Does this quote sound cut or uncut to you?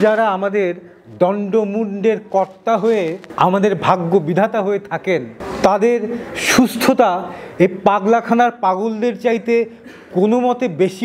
uncut